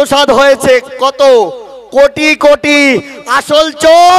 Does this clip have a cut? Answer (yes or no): no